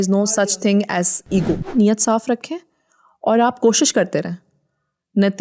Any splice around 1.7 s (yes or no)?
yes